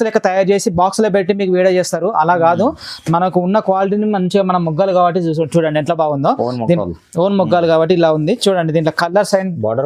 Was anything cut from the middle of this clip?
no; 0 cuts

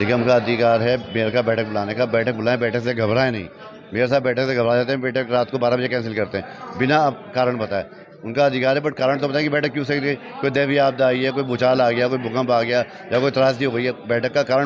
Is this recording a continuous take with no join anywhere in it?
yes; 0 cuts

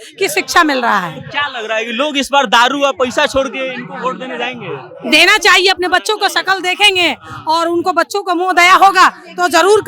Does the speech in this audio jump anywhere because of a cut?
no; 0 cuts

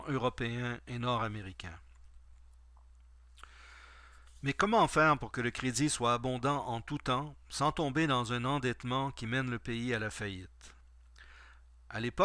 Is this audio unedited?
no; 1 cut; at 7.0 s

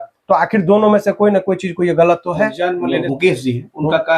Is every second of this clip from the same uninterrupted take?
no; 1 cut; at 3.1 s

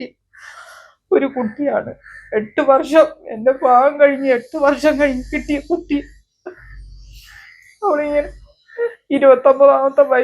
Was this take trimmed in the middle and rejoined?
no; 0 cuts

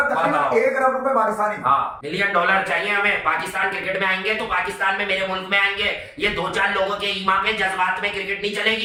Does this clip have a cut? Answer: no; 0 cuts

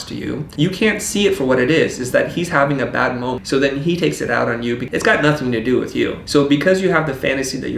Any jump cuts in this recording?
yes; 2 cuts; at 3.4 s, 4.8 s

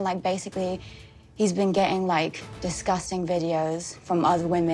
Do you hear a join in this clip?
no; 0 cuts

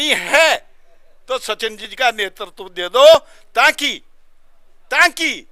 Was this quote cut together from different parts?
no; 0 cuts

